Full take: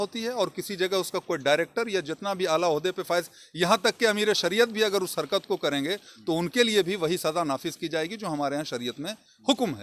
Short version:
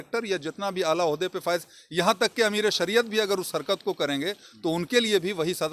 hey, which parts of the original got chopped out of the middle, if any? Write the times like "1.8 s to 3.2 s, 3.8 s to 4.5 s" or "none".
none